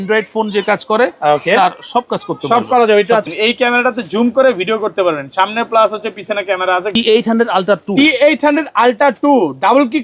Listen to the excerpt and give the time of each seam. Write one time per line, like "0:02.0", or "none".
0:03.3
0:07.0